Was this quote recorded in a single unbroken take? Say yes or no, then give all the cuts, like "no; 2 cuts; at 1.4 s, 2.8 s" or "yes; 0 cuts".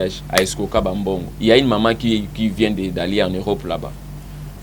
no; 1 cut; at 1.3 s